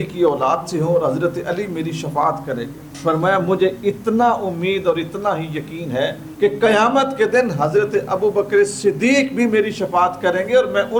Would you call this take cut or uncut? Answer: uncut